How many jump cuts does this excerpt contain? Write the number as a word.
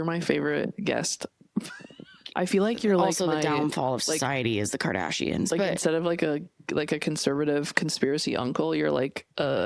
one